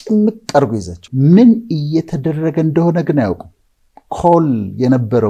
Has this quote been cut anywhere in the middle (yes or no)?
no